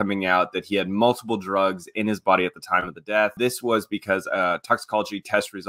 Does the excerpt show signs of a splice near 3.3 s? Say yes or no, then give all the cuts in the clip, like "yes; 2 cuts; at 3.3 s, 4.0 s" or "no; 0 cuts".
yes; 1 cut; at 3.3 s